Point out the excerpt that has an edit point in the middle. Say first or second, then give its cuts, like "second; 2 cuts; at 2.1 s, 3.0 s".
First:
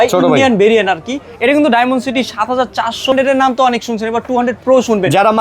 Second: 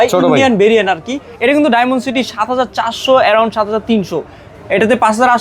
first; 1 cut; at 3.1 s